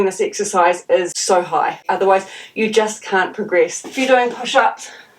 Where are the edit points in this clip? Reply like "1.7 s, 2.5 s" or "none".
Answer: 1.5 s, 3.8 s